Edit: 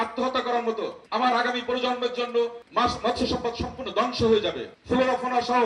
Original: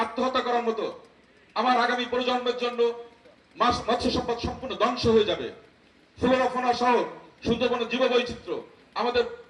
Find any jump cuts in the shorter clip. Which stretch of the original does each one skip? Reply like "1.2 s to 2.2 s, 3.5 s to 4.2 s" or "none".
1.0 s to 1.4 s, 3.0 s to 3.4 s, 5.5 s to 6.0 s